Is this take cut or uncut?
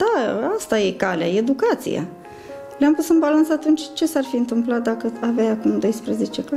uncut